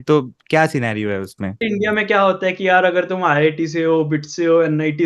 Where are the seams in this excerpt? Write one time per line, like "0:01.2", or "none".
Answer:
0:01.6

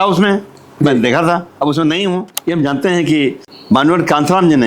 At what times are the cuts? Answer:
0:02.3

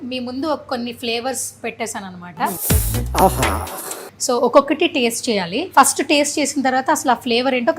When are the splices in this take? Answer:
0:02.6
0:04.1
0:05.6

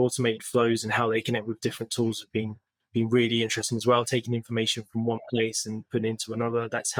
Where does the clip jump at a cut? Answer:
none

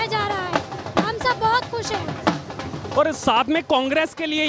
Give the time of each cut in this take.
none

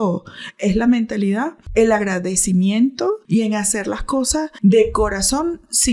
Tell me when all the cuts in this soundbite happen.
0:01.6
0:03.2
0:04.5

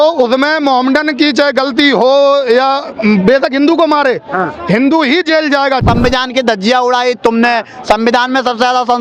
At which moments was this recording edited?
0:05.8

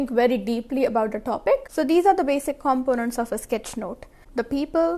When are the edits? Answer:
0:01.7

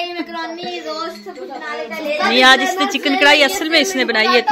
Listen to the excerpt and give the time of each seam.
none

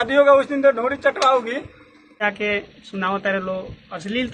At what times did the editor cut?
0:02.2

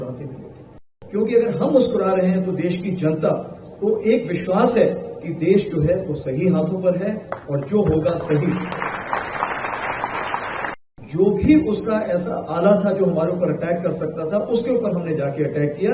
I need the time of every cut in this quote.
0:00.9
0:10.7

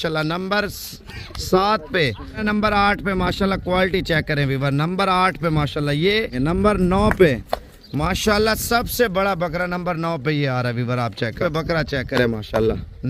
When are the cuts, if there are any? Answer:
0:02.4
0:06.3
0:11.4

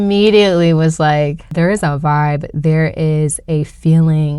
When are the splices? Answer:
0:01.5

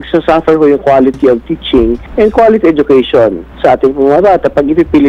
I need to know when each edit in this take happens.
0:02.0
0:03.5

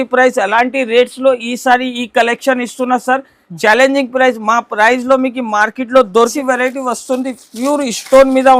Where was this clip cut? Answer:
0:06.3

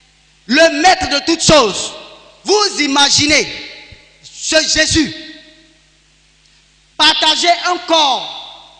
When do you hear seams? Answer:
none

